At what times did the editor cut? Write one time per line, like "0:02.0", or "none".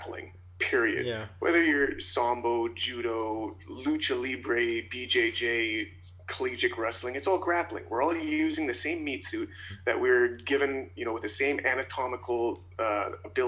none